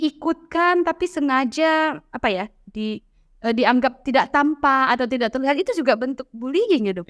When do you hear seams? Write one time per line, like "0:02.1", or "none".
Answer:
none